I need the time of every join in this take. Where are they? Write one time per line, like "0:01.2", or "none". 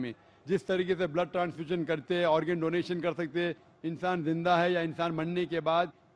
none